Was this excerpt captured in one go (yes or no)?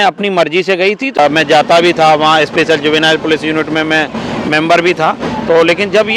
no